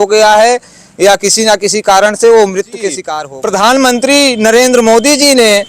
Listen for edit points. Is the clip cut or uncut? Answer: cut